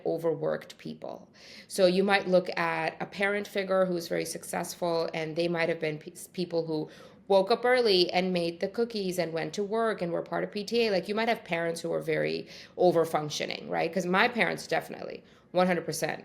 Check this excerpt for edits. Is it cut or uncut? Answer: uncut